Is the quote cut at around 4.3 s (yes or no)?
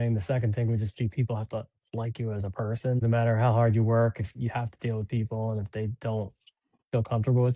no